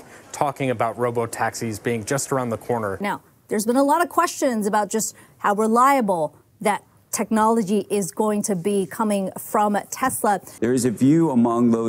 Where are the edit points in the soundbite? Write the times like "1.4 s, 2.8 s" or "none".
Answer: 3.0 s, 10.5 s